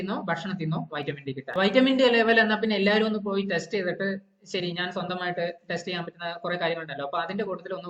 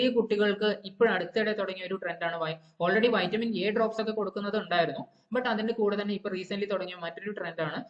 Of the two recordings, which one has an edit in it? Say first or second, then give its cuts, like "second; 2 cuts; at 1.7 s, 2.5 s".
first; 1 cut; at 1.4 s